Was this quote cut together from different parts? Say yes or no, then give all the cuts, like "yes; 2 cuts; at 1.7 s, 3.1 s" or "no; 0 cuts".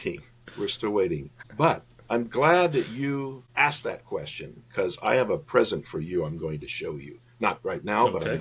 yes; 2 cuts; at 1.4 s, 3.4 s